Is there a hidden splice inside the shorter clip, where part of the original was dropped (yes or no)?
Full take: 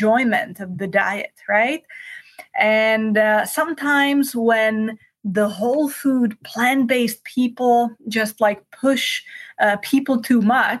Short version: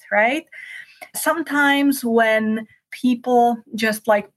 yes